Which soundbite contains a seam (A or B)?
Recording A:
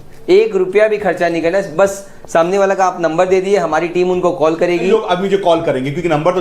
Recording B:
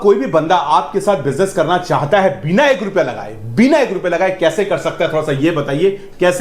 A